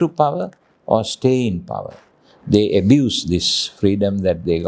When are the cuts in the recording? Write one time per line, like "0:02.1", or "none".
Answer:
none